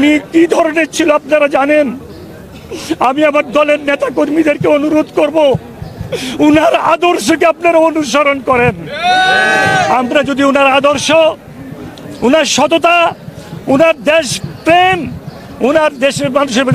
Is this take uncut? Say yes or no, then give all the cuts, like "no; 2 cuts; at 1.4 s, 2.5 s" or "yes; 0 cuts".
yes; 0 cuts